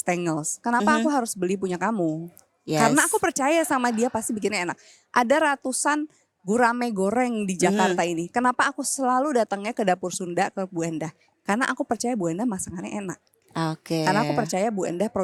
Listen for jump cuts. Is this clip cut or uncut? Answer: uncut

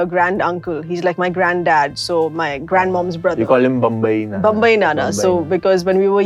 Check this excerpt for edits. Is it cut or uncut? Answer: uncut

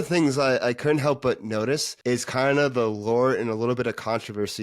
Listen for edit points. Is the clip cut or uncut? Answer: cut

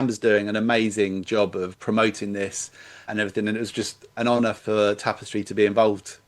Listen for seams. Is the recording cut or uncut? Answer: cut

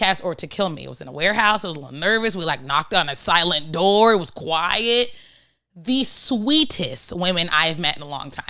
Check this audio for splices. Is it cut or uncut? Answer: uncut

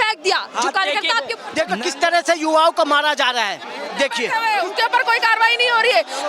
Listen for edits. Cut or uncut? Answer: cut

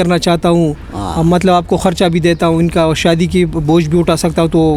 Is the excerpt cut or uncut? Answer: uncut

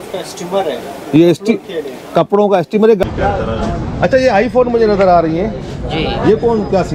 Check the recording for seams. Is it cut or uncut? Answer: cut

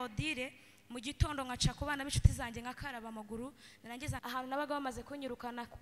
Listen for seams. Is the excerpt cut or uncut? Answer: cut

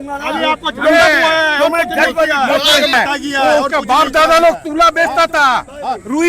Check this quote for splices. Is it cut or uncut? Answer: cut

